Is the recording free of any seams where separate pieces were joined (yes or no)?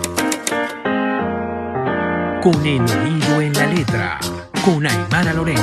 yes